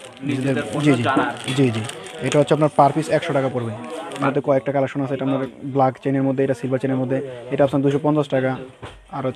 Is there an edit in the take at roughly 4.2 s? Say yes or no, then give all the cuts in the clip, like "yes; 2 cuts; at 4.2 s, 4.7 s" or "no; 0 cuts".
yes; 1 cut; at 4.2 s